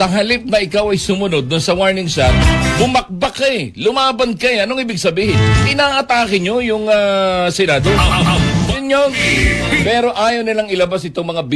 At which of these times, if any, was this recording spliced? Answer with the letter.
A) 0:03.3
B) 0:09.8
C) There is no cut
C